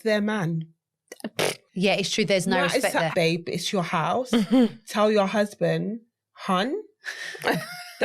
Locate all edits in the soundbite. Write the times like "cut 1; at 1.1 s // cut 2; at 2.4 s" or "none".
cut 1; at 1.6 s // cut 2; at 3.1 s